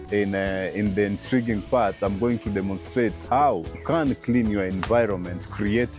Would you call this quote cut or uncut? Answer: cut